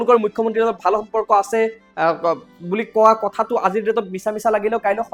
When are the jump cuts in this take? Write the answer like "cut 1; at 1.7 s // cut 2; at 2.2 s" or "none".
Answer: none